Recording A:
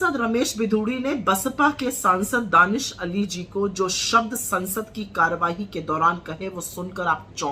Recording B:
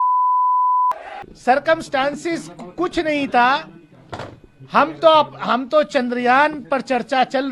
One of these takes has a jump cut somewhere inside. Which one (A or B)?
B